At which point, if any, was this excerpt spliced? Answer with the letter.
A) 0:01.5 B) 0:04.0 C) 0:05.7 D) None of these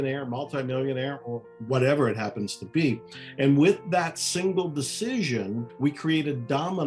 C